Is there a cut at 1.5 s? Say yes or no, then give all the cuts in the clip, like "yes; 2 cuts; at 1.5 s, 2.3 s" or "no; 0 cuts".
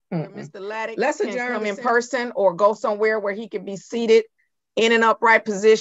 yes; 1 cut; at 1.5 s